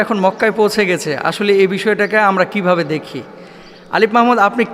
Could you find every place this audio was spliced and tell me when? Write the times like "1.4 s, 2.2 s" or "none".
none